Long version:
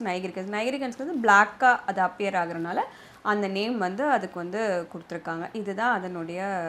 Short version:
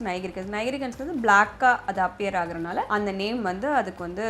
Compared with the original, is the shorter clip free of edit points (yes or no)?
no